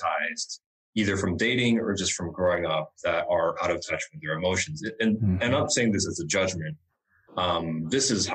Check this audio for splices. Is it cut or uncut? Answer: uncut